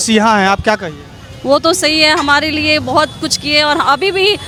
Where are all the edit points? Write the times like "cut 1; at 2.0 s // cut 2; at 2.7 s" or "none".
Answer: none